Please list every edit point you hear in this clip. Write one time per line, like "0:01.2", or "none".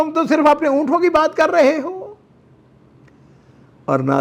none